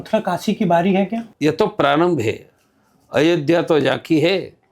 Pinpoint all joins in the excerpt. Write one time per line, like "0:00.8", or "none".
0:01.2